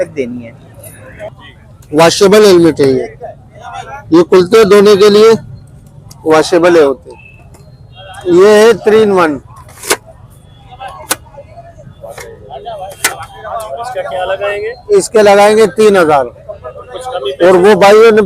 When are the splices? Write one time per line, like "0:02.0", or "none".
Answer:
0:01.4